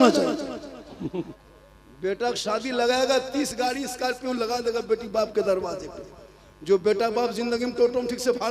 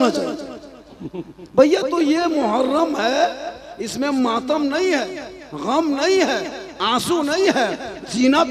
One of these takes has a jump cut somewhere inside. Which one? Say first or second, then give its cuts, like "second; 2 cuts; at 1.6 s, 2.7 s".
first; 1 cut; at 1.4 s